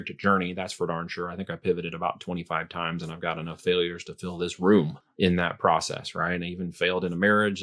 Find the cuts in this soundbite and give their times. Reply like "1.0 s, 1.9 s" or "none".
5.0 s